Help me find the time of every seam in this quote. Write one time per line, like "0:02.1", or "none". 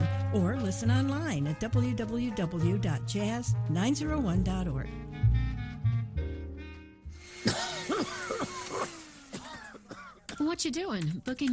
0:07.0